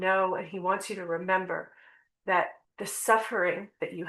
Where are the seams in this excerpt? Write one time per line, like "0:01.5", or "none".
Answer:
0:02.6